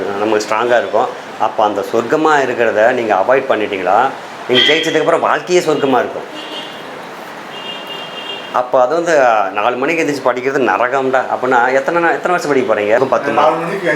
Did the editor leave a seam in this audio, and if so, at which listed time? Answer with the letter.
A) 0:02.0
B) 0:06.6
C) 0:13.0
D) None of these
C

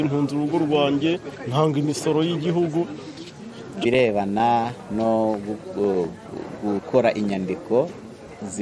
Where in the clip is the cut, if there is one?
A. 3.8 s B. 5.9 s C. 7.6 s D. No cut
A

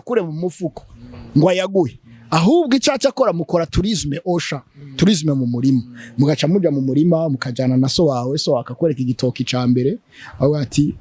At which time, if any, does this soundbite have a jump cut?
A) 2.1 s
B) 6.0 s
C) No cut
C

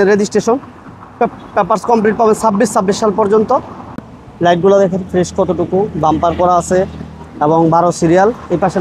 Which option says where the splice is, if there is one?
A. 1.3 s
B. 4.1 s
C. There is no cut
B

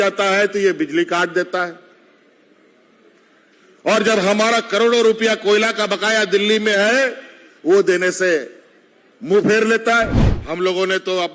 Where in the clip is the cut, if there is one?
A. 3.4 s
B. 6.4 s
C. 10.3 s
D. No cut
C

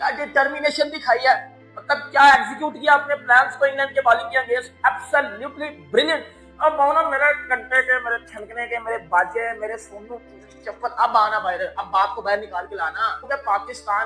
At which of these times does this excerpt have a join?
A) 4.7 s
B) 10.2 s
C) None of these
C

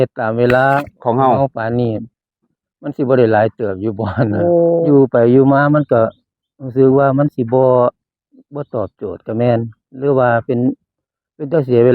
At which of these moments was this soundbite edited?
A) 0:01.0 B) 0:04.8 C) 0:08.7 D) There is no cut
B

